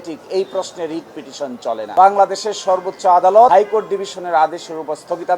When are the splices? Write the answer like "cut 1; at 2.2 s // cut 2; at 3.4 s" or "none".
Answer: cut 1; at 1.9 s